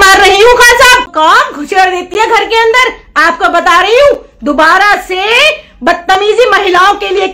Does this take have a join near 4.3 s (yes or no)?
no